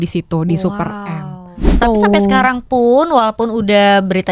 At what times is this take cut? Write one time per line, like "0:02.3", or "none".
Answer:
0:01.7